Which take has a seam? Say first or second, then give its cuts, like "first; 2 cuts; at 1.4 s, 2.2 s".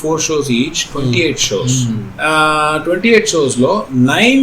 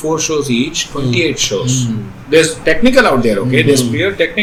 first; 1 cut; at 2.1 s